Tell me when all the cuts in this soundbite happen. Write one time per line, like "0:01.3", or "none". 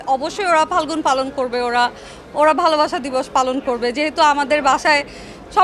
none